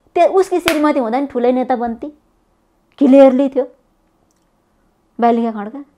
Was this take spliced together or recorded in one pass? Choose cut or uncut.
uncut